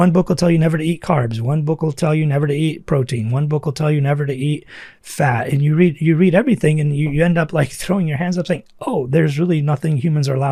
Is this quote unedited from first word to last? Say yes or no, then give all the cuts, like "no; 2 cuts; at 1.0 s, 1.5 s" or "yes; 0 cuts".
yes; 0 cuts